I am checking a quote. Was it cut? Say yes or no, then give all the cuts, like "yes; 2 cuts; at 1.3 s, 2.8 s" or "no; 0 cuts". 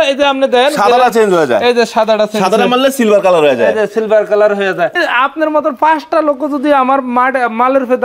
yes; 1 cut; at 4.9 s